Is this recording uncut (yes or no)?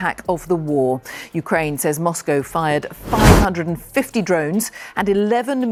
yes